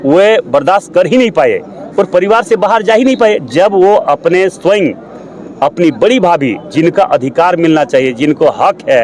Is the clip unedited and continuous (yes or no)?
yes